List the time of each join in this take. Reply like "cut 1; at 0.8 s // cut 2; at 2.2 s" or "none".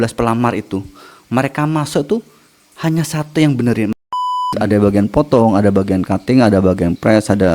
cut 1; at 3.9 s